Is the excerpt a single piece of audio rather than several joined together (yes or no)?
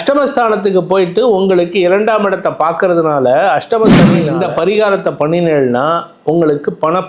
no